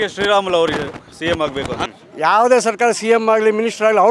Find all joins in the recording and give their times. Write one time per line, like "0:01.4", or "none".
0:01.8

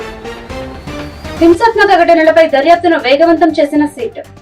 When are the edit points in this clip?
0:01.4

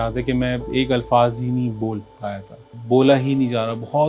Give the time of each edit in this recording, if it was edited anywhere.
0:02.7

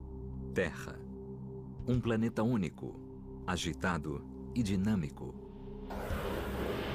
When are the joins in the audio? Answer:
none

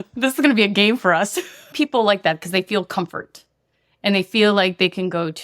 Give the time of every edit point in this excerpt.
0:01.7

